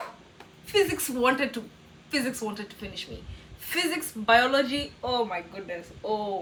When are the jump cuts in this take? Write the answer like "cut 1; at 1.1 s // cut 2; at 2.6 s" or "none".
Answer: none